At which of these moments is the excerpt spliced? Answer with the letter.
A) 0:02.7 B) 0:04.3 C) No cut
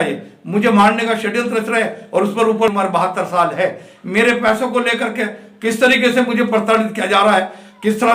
A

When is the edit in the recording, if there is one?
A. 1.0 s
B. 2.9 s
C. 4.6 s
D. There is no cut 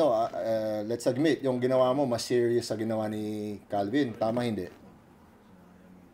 D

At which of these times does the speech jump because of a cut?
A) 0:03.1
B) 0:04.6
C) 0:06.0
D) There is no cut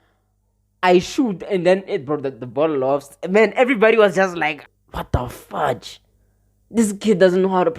B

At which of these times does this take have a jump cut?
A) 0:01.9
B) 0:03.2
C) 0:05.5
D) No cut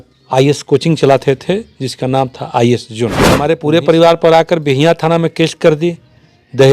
B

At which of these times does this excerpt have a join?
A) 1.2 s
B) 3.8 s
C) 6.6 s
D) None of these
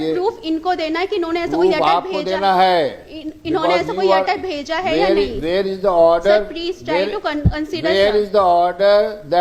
D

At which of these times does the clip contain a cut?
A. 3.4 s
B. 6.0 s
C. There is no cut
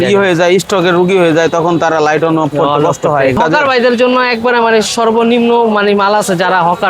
A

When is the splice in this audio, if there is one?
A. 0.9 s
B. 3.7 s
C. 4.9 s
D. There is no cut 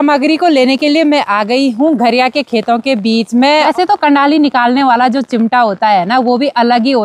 B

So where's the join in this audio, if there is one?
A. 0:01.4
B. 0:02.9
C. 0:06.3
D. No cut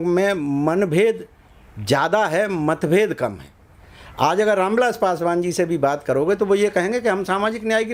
D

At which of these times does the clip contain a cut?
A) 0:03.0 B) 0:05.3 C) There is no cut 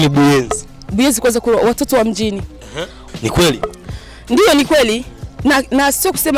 A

